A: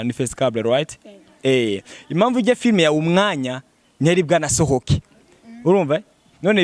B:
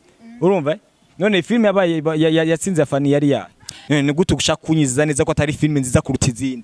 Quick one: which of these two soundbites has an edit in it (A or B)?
B